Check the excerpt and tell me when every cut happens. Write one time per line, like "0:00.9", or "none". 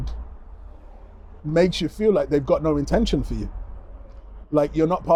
none